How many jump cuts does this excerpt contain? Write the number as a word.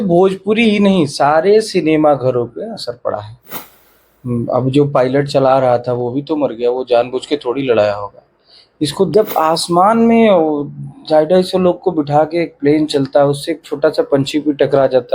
two